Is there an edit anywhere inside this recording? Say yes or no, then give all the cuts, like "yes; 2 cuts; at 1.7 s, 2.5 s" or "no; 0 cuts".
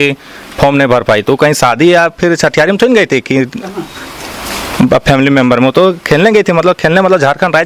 no; 0 cuts